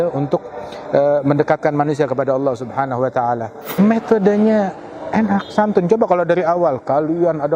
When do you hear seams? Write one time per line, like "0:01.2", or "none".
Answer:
0:03.6